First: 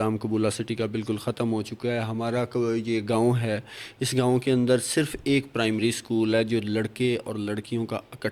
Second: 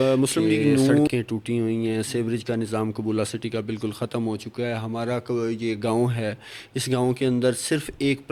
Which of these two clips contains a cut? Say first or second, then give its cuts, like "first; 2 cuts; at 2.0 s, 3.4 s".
second; 1 cut; at 1.1 s